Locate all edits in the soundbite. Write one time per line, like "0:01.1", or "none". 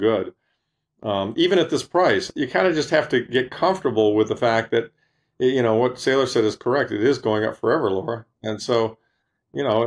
0:02.3